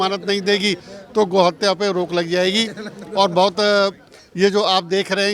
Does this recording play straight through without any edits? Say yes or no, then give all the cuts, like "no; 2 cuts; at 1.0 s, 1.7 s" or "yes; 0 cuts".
yes; 0 cuts